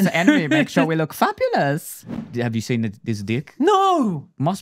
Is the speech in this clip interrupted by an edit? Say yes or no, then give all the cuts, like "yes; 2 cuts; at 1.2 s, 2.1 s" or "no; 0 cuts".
yes; 1 cut; at 2.2 s